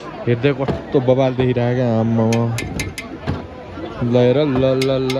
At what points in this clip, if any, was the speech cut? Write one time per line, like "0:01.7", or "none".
none